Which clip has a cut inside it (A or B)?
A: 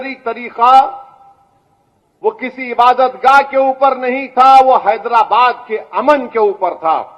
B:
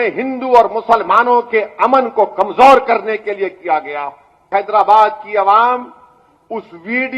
B